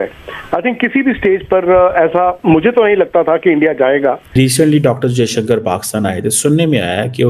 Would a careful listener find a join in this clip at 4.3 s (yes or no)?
yes